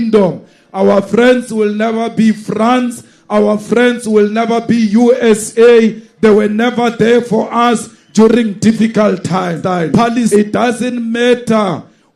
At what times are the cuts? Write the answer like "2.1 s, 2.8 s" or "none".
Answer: 10.3 s